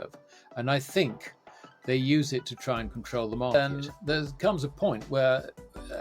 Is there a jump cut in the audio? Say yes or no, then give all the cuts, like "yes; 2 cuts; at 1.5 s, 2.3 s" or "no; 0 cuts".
yes; 1 cut; at 3.5 s